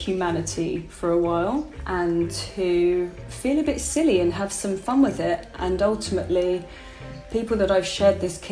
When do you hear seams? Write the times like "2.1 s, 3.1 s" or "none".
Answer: 1.8 s, 3.2 s